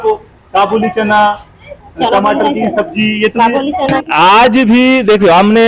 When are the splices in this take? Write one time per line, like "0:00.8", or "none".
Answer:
0:04.0